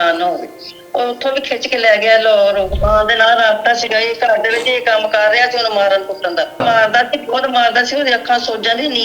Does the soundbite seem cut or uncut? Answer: cut